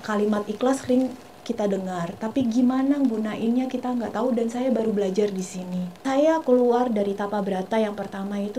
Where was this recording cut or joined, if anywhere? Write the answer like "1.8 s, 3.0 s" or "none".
5.9 s